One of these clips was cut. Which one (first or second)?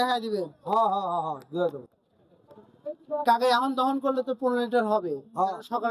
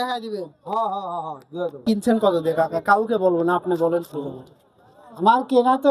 second